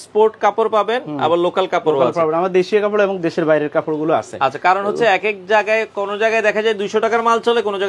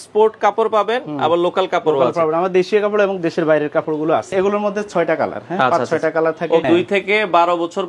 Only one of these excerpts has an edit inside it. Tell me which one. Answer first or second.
second